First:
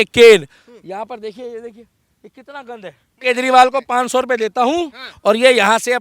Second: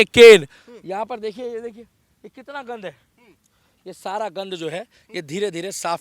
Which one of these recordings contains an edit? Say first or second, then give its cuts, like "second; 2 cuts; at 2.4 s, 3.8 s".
first; 1 cut; at 3.2 s